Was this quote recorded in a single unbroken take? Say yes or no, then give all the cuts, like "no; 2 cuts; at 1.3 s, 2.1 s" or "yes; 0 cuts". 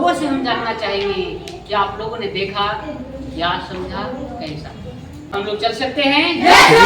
no; 1 cut; at 5.3 s